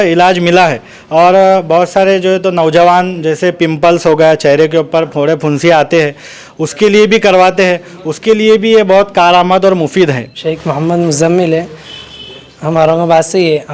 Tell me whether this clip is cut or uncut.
cut